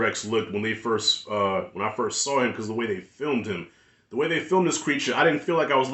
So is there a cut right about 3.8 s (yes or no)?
yes